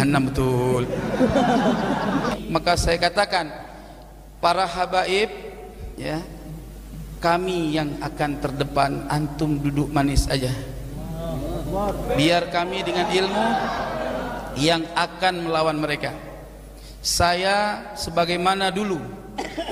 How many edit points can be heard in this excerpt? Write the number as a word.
one